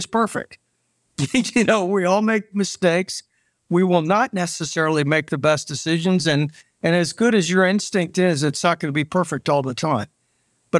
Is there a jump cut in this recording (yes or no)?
no